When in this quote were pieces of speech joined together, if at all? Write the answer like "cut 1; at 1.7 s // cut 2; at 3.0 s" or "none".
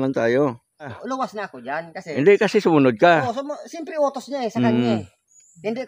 cut 1; at 1.0 s